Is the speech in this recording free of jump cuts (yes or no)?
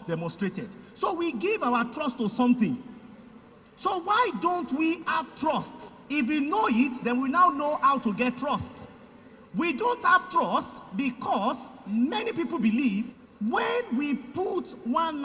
no